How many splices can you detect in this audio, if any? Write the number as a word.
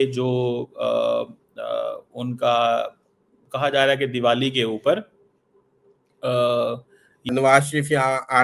one